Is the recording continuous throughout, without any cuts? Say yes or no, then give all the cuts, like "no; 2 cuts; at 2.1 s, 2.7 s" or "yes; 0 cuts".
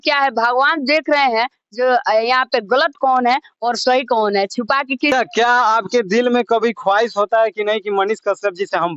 no; 1 cut; at 5.1 s